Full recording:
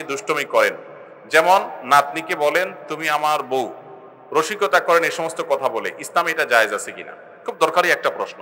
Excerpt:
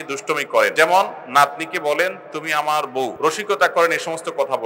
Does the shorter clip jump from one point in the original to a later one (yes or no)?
yes